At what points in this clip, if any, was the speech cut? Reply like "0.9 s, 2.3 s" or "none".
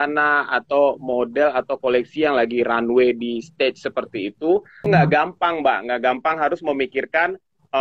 4.7 s